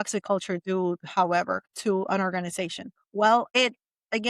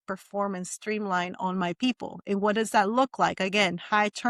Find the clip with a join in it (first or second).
first